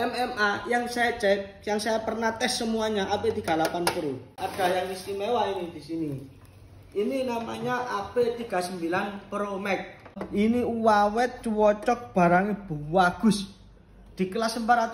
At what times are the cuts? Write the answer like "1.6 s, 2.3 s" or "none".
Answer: 4.4 s, 10.2 s